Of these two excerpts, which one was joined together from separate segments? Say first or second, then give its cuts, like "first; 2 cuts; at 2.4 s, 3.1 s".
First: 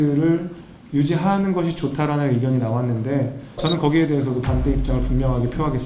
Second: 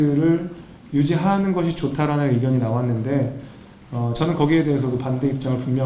first; 1 cut; at 3.5 s